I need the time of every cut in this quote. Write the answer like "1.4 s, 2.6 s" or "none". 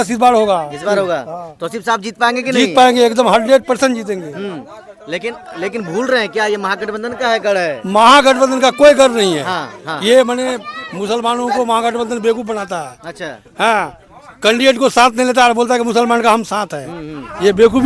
none